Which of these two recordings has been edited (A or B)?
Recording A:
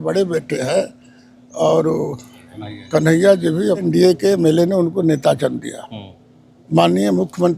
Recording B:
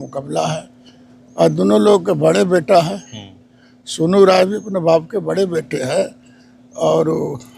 A